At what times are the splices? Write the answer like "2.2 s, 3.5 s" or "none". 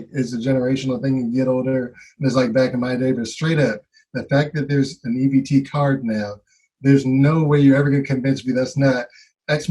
none